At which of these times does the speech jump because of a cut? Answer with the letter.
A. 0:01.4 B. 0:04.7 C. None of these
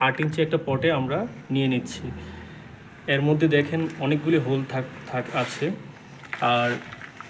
C